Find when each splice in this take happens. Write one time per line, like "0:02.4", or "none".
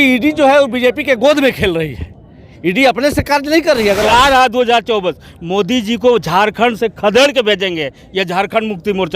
0:04.1
0:07.2

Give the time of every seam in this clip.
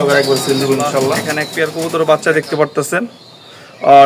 0:01.4

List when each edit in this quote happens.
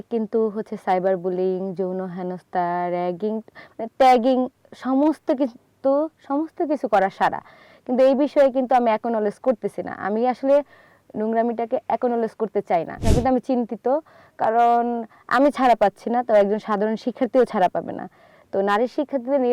0:13.0

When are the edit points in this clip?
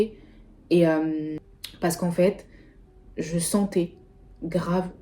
0:01.4

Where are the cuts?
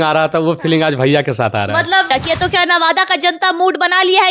0:02.1

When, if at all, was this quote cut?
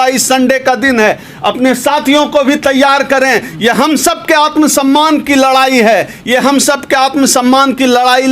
none

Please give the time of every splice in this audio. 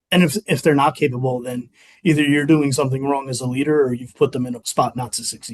0:04.6

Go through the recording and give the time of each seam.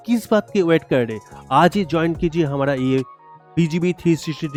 none

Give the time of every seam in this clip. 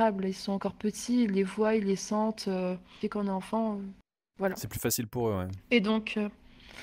none

